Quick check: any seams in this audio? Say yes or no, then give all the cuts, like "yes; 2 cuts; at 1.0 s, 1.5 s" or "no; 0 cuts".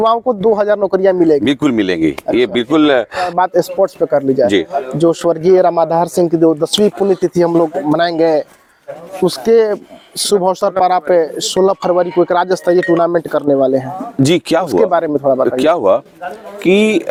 no; 0 cuts